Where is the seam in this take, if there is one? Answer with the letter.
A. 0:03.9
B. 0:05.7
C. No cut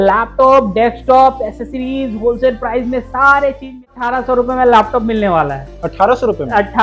A